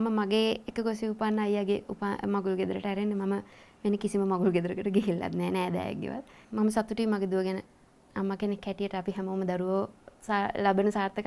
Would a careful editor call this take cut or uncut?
cut